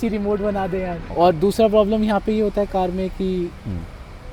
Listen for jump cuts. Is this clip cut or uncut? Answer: cut